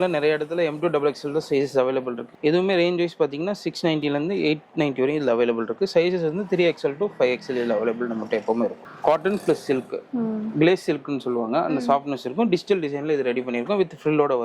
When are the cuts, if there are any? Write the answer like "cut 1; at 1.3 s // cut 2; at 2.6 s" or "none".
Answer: cut 1; at 2.3 s // cut 2; at 8.8 s